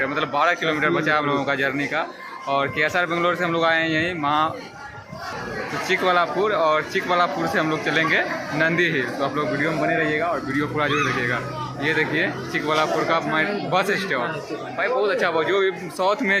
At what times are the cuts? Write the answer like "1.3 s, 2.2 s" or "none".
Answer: none